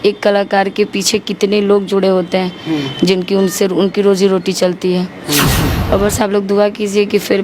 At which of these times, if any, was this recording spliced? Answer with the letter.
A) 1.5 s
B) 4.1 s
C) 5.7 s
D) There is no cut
C